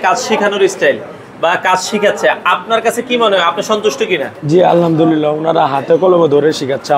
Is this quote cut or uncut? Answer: uncut